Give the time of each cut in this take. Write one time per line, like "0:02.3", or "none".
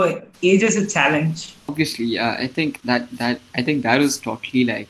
0:01.6